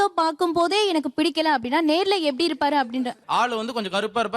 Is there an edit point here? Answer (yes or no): yes